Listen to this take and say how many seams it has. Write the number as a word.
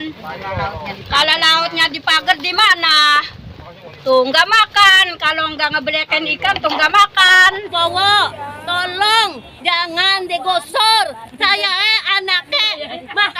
one